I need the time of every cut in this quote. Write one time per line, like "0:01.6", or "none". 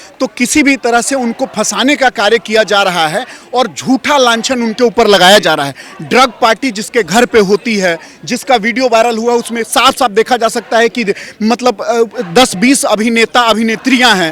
none